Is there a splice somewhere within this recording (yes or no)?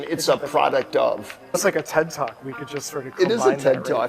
yes